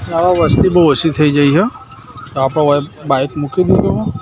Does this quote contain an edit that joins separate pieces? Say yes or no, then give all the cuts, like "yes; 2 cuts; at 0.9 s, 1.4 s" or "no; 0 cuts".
no; 0 cuts